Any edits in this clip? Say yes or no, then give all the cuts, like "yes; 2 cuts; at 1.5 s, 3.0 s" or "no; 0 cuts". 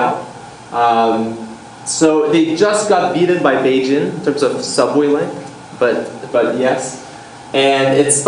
yes; 1 cut; at 1.5 s